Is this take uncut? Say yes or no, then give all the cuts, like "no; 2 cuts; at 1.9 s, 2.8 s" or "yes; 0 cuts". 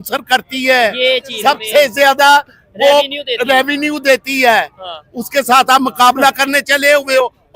yes; 0 cuts